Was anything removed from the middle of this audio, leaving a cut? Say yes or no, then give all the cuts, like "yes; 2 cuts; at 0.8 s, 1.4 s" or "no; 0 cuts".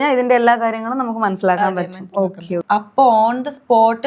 yes; 1 cut; at 2.6 s